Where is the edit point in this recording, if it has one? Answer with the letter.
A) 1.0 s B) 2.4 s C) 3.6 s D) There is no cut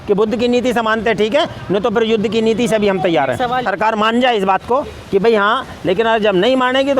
C